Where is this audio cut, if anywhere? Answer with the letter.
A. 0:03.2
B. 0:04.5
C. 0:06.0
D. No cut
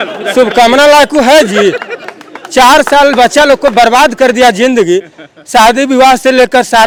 D